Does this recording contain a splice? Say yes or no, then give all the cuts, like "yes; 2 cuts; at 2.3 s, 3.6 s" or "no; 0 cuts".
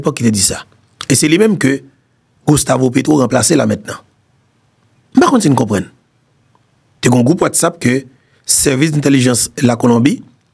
no; 0 cuts